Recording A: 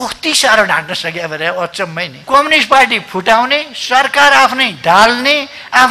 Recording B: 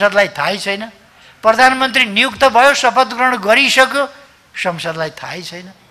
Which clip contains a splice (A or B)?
A